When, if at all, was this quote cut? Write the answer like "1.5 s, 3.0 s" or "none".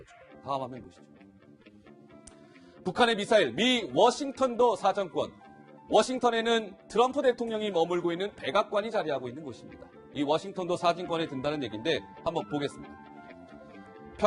6.0 s